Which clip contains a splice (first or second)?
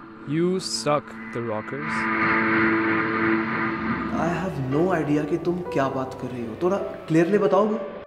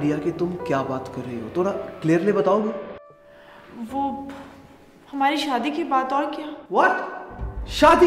first